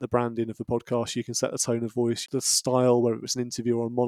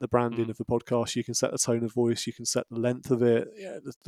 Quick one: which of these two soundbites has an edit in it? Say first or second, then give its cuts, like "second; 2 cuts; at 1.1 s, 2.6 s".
first; 1 cut; at 2.2 s